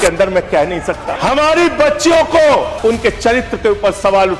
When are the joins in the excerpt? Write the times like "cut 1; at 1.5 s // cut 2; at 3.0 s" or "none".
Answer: cut 1; at 1.1 s // cut 2; at 2.7 s